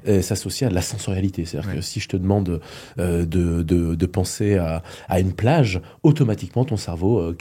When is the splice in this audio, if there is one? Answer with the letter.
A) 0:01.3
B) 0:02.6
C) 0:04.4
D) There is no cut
D